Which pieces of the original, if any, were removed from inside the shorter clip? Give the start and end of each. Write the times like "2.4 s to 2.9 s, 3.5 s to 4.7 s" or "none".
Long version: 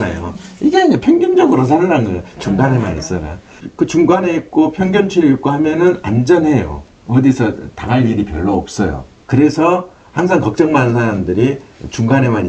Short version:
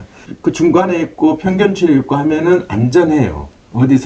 none